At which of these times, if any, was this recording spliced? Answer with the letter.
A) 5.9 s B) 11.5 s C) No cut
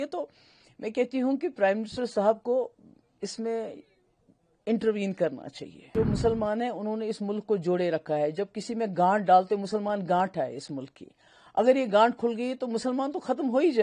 A